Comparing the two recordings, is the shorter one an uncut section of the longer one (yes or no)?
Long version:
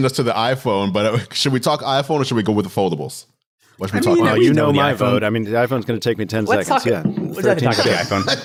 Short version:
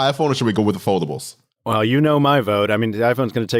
no